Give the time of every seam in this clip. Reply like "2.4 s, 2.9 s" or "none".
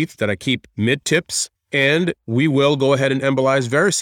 1.5 s

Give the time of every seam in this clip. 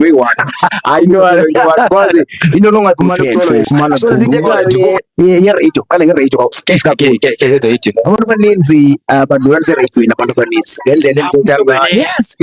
4.6 s

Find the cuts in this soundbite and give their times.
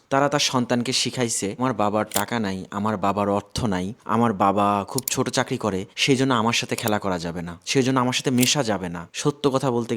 1.6 s, 9.1 s

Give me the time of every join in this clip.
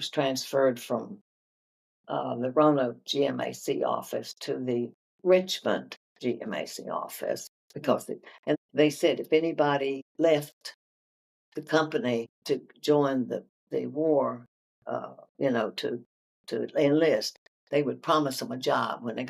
8.5 s, 10.1 s, 12.3 s

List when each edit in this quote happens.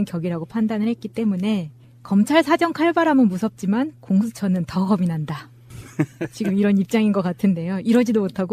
none

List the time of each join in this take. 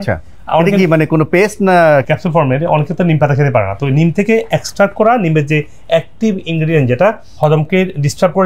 2.0 s

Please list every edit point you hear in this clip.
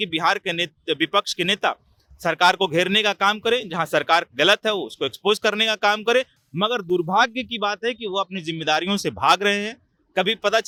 none

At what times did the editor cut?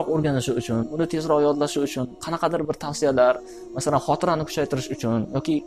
none

